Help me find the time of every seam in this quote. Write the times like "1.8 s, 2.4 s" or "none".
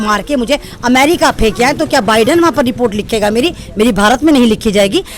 none